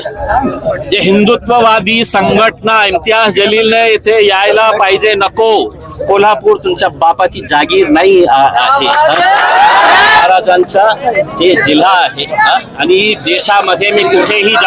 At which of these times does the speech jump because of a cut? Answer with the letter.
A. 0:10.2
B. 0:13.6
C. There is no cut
A